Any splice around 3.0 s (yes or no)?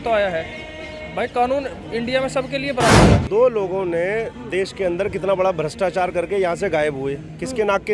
yes